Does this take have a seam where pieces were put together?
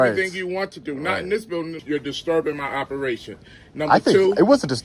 yes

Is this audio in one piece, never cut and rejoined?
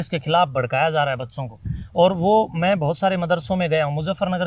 yes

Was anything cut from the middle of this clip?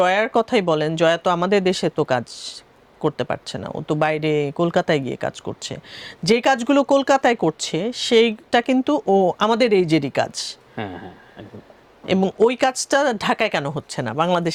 no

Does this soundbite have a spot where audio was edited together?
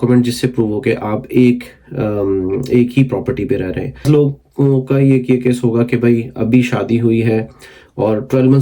yes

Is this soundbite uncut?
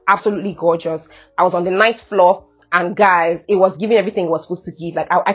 yes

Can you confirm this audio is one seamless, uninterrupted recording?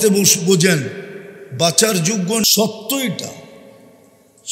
no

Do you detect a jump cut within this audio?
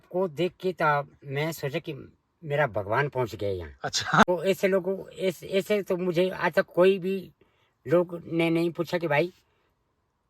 yes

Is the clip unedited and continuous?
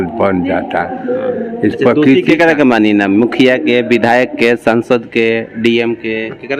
yes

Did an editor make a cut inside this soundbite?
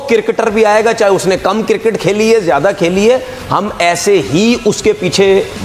no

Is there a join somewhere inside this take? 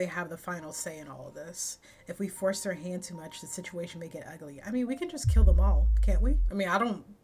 no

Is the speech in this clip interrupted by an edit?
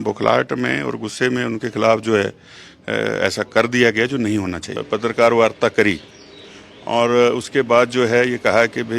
yes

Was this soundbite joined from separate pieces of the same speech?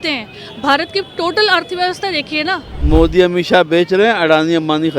yes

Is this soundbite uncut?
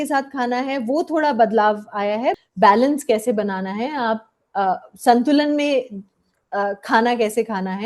no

